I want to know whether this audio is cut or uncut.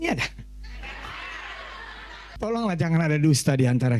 cut